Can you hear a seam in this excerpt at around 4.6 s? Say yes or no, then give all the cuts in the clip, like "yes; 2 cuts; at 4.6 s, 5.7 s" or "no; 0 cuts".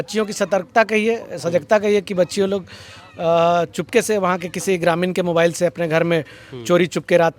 no; 0 cuts